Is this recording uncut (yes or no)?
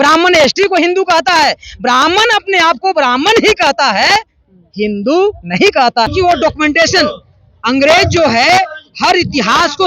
no